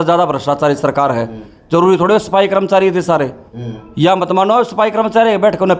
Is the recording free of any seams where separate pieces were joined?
yes; 0 cuts

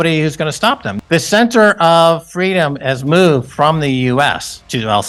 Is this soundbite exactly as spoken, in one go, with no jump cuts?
yes; 0 cuts

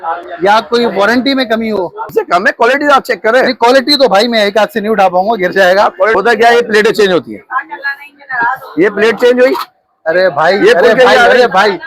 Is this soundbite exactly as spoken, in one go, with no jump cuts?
no; 2 cuts; at 2.1 s, 6.1 s

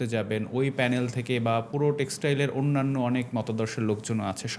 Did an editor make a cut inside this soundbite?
no; 0 cuts

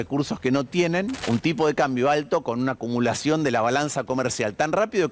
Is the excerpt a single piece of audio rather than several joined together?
no; 1 cut; at 1.2 s

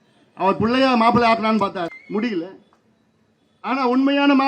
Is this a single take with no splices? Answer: no; 1 cut; at 2.0 s

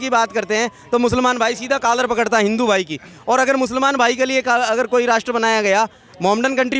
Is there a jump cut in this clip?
no; 0 cuts

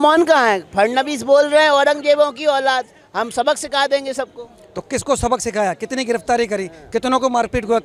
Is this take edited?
no; 0 cuts

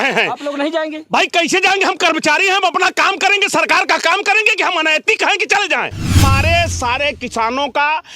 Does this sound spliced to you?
yes; 1 cut; at 6.2 s

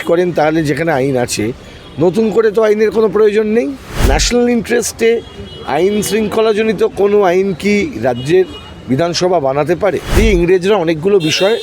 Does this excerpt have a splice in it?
yes; 2 cuts; at 3.9 s, 10.1 s

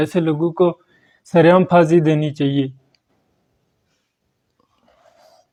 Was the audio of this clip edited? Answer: no; 0 cuts

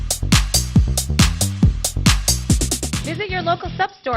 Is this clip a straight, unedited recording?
no; 1 cut; at 3.1 s

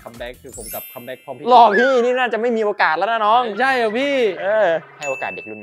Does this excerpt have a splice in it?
no; 0 cuts

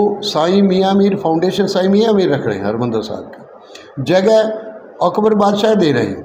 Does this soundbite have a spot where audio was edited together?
no; 0 cuts

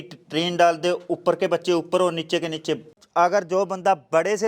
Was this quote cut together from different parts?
yes; 1 cut; at 3.0 s

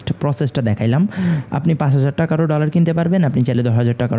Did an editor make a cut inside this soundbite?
no; 0 cuts

